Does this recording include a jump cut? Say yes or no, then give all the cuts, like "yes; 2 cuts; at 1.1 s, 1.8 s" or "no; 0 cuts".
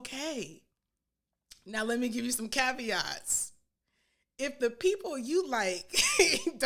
no; 0 cuts